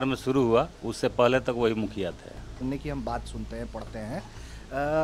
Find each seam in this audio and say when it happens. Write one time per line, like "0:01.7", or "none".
0:02.6